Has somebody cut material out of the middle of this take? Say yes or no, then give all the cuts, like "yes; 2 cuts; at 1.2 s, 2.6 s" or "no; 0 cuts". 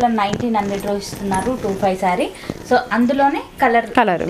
no; 0 cuts